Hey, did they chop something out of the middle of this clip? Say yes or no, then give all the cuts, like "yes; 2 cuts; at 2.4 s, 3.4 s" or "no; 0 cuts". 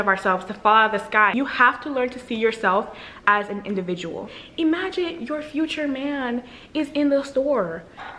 yes; 2 cuts; at 1.3 s, 4.3 s